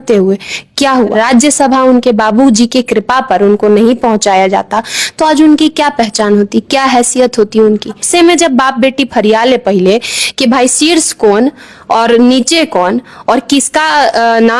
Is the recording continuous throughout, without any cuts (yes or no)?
no